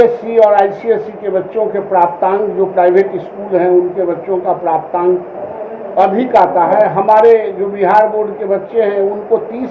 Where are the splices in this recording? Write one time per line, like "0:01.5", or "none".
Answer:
none